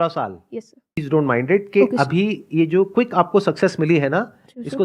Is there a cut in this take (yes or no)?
yes